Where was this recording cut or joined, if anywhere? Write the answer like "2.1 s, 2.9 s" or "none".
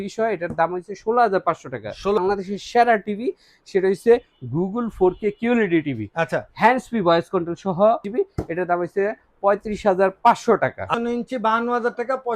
2.2 s, 8.1 s, 10.9 s